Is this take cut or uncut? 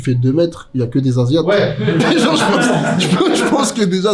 uncut